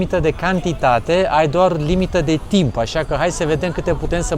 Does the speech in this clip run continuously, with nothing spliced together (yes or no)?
yes